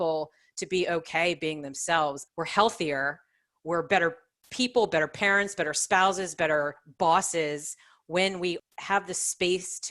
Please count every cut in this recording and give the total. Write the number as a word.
two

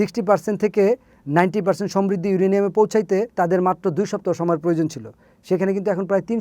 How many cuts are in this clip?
one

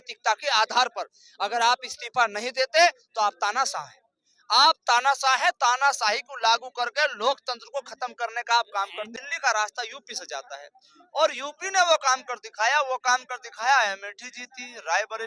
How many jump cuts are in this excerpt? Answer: one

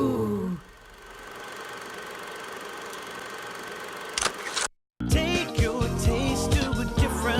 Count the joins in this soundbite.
one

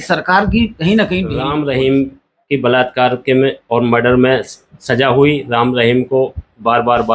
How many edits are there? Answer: one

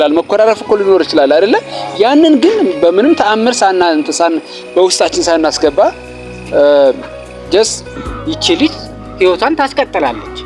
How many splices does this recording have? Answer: one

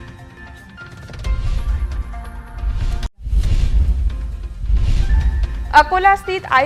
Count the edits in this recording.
one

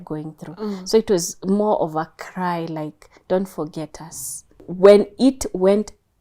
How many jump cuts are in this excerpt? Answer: one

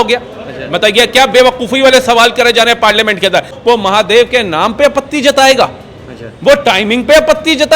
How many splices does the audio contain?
one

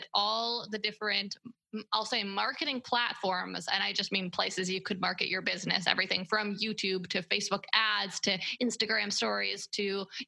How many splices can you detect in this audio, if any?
zero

